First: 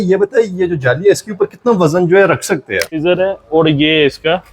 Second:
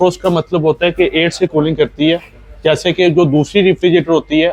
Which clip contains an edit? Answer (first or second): first